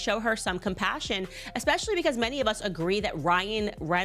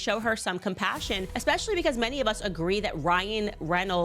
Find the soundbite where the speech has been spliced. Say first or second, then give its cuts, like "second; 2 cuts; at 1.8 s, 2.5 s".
second; 1 cut; at 1.3 s